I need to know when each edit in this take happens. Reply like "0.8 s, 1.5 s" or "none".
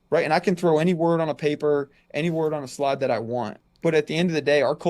3.5 s